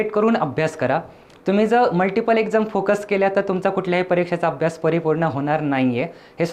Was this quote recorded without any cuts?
yes; 0 cuts

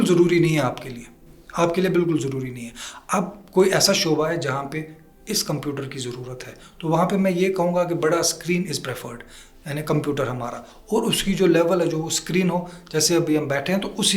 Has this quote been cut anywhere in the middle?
no; 0 cuts

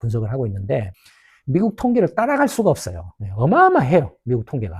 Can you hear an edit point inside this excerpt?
no; 0 cuts

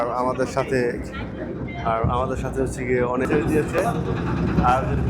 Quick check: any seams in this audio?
yes; 1 cut; at 3.2 s

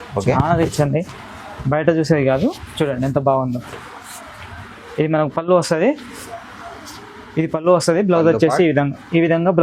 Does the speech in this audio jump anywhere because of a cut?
no; 0 cuts

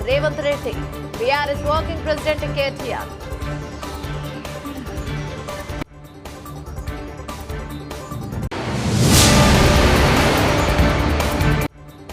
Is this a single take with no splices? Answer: yes; 0 cuts

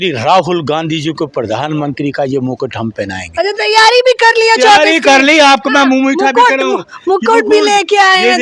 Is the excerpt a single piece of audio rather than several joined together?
yes; 0 cuts

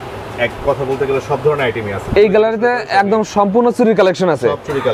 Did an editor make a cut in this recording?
no; 0 cuts

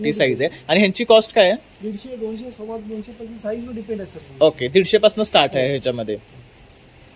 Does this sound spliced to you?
no; 0 cuts

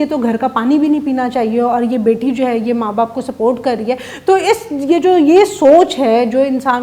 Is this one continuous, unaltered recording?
yes; 0 cuts

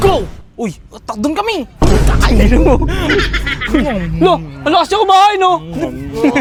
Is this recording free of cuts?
yes; 0 cuts

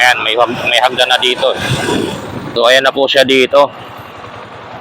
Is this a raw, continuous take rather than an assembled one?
no; 1 cut; at 2.5 s

